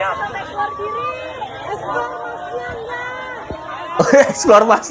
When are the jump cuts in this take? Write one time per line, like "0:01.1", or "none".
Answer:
none